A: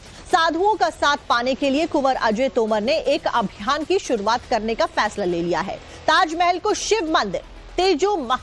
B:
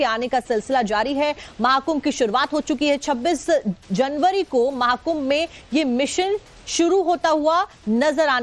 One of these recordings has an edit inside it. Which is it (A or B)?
B